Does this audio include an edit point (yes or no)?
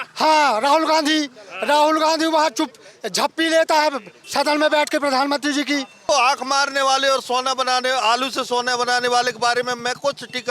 yes